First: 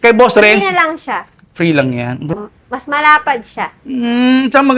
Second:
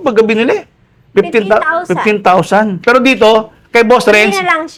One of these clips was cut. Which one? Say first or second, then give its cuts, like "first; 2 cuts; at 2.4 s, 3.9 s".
first; 1 cut; at 2.3 s